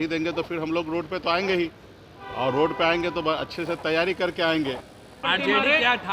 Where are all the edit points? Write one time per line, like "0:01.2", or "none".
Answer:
0:05.1